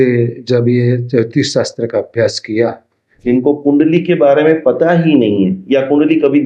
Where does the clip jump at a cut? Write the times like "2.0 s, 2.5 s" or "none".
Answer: 3.2 s